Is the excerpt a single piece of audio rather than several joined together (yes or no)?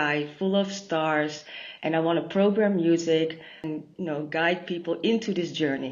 no